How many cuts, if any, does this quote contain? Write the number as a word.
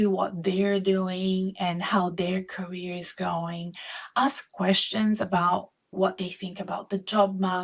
one